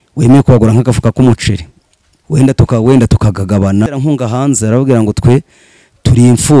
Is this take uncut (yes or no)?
no